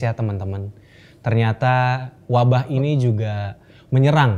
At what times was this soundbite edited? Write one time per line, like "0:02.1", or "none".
none